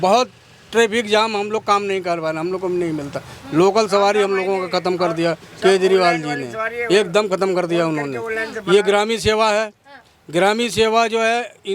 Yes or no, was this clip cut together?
no